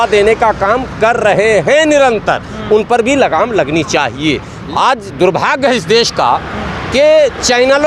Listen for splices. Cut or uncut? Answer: cut